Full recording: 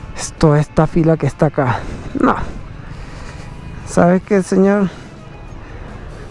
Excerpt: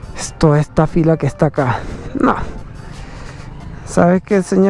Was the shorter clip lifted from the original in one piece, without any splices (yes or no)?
yes